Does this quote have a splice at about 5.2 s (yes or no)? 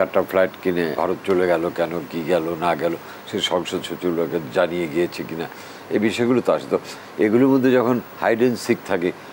no